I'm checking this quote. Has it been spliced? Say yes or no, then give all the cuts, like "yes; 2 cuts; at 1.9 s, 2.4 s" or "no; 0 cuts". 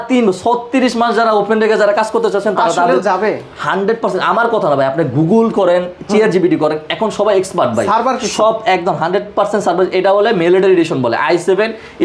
no; 0 cuts